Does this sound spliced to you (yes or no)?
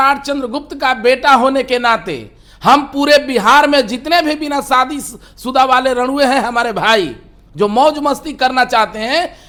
no